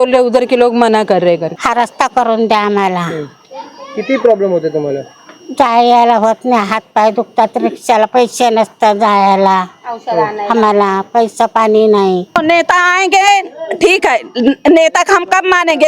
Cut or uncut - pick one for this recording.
cut